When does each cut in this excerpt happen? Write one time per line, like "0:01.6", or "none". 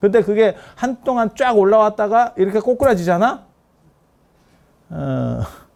none